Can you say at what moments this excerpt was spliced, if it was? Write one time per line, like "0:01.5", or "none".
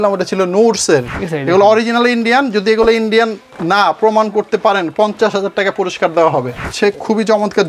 0:01.1
0:06.7